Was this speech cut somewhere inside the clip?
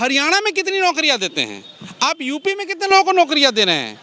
no; 0 cuts

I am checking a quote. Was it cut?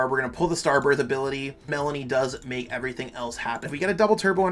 yes; 2 cuts; at 1.7 s, 3.7 s

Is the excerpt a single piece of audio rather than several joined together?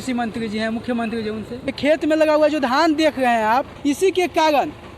no; 2 cuts; at 1.7 s, 3.7 s

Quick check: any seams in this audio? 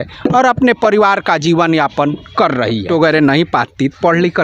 yes; 1 cut; at 2.9 s

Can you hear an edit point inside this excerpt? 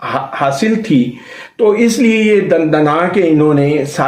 no; 0 cuts

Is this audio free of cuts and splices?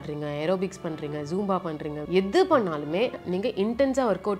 no; 2 cuts; at 2.0 s, 3.2 s

